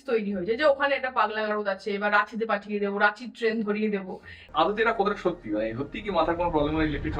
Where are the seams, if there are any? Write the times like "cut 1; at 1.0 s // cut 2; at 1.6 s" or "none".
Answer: cut 1; at 4.4 s